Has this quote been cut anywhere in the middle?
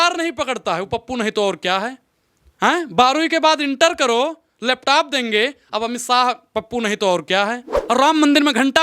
yes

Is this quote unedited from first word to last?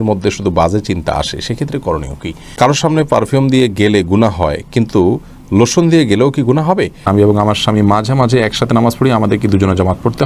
no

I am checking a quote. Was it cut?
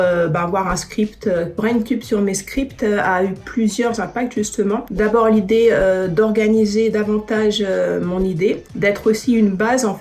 yes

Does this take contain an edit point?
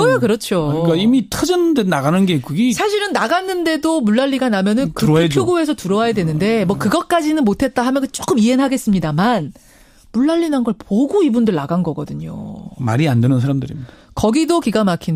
no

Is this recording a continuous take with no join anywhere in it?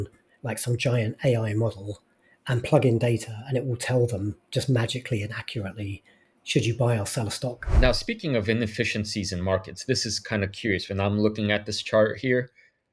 no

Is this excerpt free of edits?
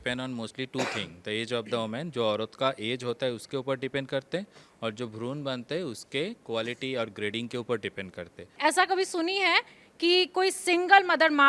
no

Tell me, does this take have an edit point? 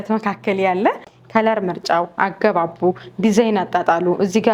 yes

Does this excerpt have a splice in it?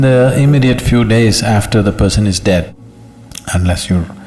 yes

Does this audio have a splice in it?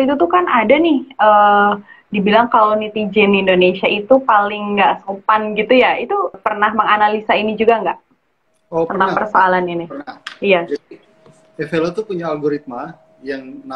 yes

